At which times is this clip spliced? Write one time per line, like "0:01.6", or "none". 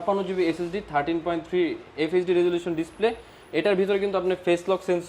none